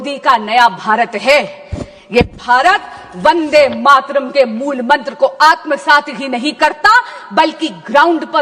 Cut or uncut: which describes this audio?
uncut